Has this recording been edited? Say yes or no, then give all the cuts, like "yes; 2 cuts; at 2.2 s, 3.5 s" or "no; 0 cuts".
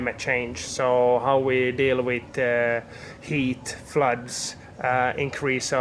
no; 0 cuts